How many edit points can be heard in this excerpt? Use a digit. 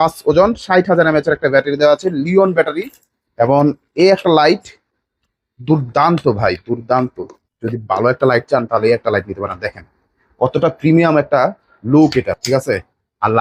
0